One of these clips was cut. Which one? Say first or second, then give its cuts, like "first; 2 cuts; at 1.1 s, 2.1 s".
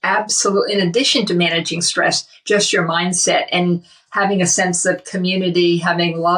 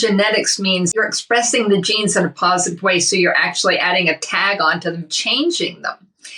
second; 1 cut; at 0.9 s